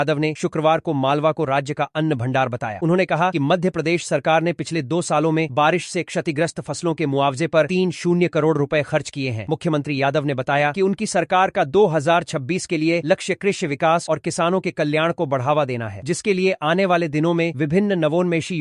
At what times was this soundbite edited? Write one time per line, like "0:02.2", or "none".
none